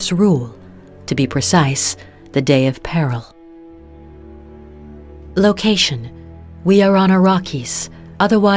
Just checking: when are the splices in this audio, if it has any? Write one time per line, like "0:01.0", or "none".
0:05.3